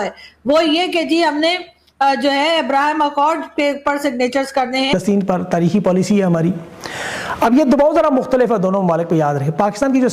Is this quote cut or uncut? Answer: uncut